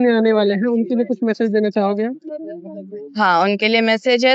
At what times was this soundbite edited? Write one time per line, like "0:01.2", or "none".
none